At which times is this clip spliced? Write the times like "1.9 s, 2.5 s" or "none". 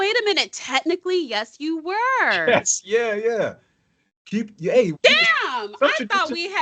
none